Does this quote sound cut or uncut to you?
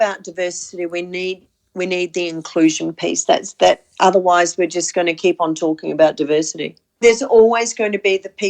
cut